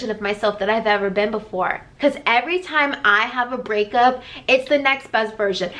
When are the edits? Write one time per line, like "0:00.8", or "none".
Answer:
0:01.9

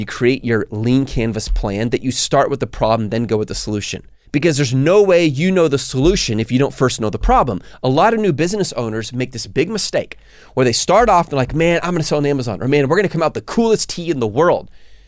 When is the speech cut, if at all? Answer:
none

